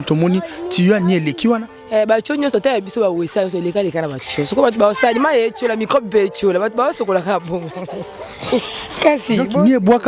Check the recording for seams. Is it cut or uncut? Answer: uncut